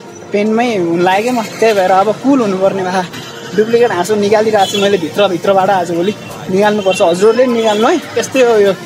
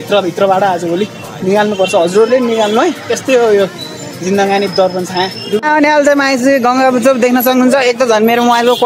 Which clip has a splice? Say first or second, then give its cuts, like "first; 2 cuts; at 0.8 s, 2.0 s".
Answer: second; 1 cut; at 5.6 s